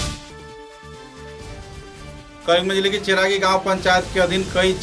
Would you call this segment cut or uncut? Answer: cut